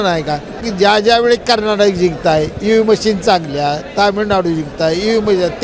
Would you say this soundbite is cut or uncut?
cut